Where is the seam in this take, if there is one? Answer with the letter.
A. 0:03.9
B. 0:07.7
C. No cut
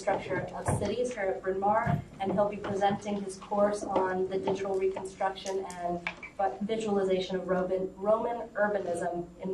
A